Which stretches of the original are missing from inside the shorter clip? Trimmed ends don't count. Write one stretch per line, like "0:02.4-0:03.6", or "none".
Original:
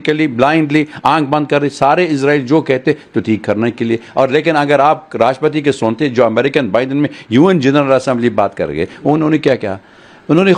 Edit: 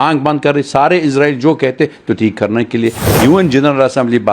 0:04.1-0:07.1